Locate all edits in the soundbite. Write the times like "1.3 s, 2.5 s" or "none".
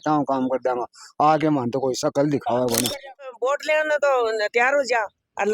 3.3 s